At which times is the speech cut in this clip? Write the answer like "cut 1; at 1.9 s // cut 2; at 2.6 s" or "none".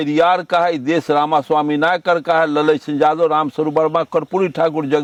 none